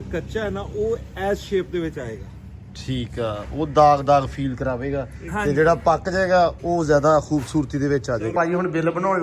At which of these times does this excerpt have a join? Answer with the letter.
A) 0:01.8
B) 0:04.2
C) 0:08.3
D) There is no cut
C